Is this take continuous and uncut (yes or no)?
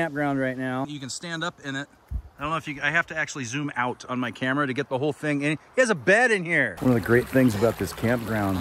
no